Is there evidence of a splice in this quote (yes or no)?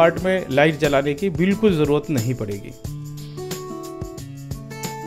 no